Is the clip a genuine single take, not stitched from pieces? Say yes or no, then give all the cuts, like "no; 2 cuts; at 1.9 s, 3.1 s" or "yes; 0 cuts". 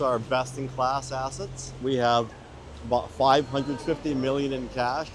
no; 1 cut; at 1.8 s